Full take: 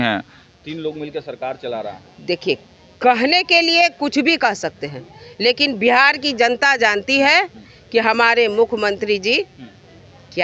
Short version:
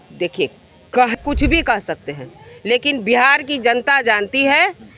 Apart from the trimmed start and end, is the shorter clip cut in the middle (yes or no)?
yes